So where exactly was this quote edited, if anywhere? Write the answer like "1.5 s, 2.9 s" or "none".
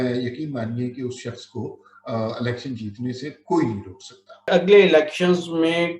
4.5 s